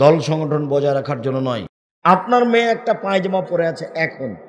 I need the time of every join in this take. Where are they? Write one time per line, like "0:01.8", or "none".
0:01.8